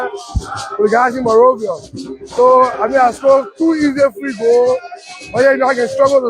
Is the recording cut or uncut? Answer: cut